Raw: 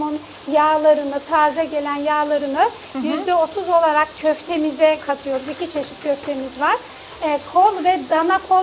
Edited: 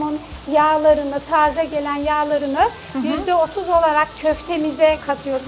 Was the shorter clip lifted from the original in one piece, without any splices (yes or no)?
yes